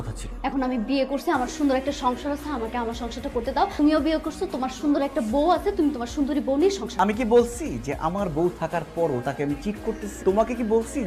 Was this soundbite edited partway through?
no; 0 cuts

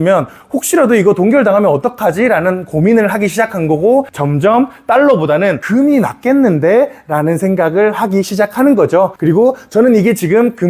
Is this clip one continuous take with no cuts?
no; 3 cuts; at 4.2 s, 5.6 s, 9.2 s

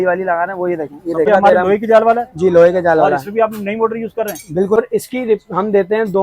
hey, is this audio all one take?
no; 2 cuts; at 1.3 s, 4.8 s

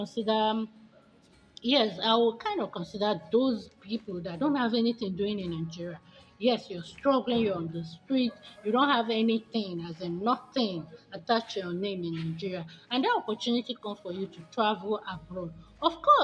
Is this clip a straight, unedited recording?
yes; 0 cuts

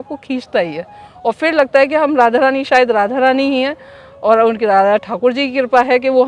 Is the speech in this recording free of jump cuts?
yes; 0 cuts

